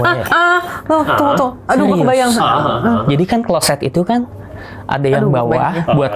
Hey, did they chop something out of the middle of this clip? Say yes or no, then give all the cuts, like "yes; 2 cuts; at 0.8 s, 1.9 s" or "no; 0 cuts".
no; 0 cuts